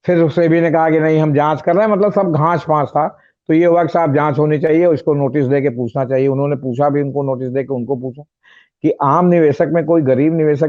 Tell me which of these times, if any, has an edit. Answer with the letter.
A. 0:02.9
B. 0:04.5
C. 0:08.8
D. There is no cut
D